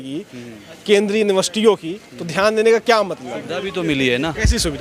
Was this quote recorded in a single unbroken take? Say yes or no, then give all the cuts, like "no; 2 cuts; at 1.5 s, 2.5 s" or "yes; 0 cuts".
yes; 0 cuts